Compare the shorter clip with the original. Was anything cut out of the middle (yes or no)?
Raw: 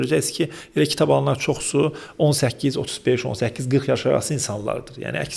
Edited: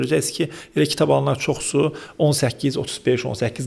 no